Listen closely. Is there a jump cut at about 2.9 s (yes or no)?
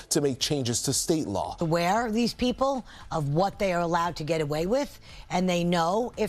no